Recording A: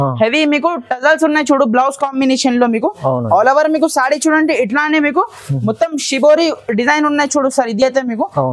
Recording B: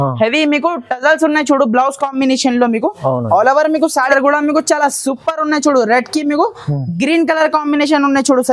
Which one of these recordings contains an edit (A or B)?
B